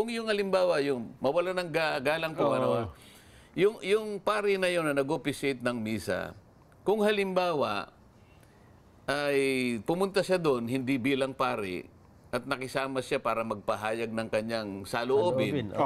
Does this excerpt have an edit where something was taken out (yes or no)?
no